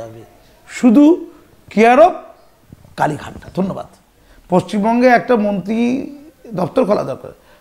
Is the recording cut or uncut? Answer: cut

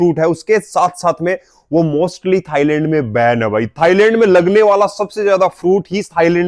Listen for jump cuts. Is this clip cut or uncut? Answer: uncut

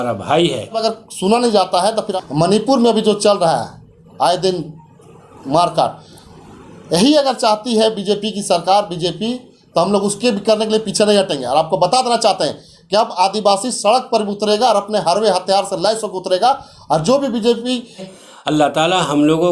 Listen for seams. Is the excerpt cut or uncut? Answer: cut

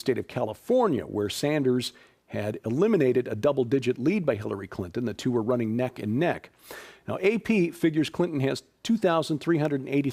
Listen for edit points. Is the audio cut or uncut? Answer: cut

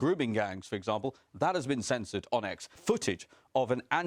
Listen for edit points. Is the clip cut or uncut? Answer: cut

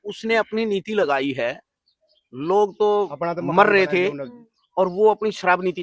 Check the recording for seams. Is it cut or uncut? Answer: uncut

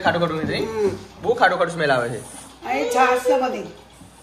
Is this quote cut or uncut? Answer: uncut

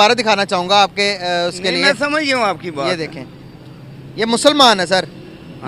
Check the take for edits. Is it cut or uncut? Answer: uncut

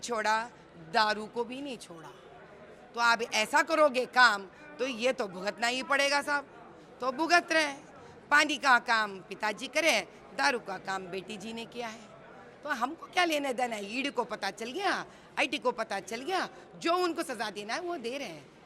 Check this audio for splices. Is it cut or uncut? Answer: uncut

